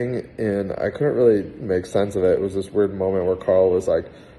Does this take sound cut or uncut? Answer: uncut